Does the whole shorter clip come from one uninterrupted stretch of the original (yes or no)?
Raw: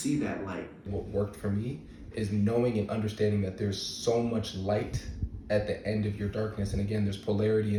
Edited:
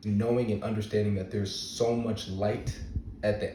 yes